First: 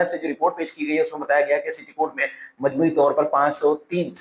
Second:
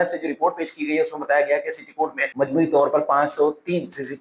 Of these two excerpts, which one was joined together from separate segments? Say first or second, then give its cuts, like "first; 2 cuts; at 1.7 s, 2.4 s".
second; 1 cut; at 2.2 s